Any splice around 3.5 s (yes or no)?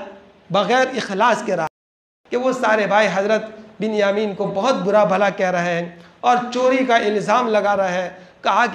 no